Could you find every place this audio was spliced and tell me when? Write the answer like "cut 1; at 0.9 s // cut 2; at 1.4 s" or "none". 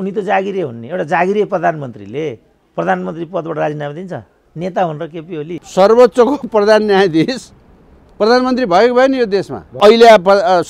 cut 1; at 5.6 s // cut 2; at 9.8 s